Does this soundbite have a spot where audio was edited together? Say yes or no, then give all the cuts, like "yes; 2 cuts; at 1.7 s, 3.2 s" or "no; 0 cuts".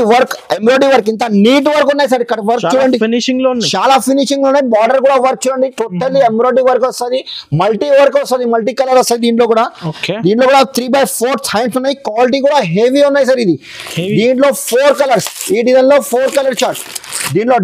no; 0 cuts